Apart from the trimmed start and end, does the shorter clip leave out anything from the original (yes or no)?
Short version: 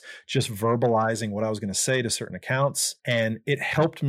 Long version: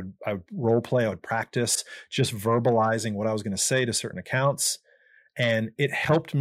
yes